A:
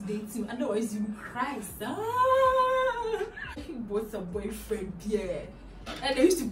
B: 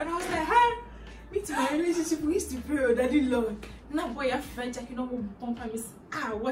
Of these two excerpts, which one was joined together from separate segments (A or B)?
A